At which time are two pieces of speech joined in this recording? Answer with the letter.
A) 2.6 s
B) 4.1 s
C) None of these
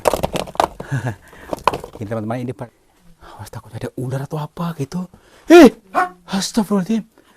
A